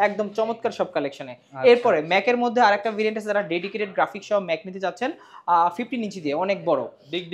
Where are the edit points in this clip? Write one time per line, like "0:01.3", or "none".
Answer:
none